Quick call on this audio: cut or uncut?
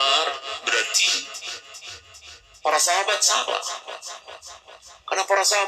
uncut